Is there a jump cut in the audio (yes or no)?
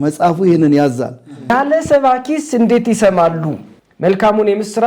yes